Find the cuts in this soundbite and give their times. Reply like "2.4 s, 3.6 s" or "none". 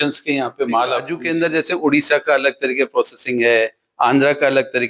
1.1 s